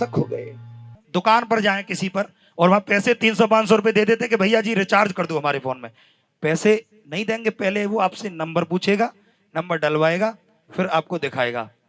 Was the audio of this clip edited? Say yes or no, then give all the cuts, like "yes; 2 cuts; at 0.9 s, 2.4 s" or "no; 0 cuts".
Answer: yes; 1 cut; at 1.0 s